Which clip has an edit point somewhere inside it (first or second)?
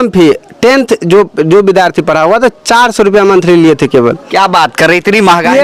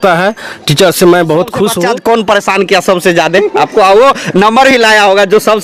second